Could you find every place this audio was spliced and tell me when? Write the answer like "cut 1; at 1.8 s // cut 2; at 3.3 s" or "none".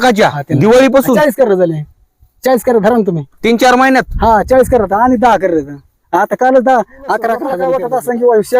cut 1; at 7.5 s